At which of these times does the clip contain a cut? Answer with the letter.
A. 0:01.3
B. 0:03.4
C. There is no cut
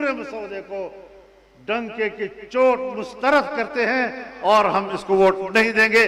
C